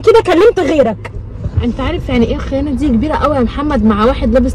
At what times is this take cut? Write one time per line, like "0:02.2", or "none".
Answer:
none